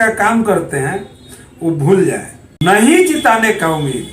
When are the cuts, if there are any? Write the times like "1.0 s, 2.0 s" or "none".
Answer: 2.5 s